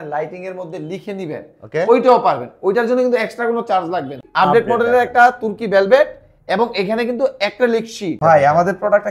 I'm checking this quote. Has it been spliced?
yes; 2 cuts; at 4.2 s, 8.1 s

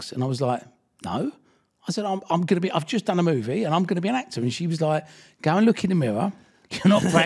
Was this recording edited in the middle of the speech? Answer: no; 0 cuts

